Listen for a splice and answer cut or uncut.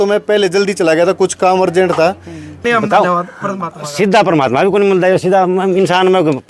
cut